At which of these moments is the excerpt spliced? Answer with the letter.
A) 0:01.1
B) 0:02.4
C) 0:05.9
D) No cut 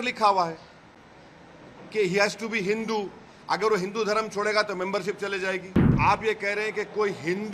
C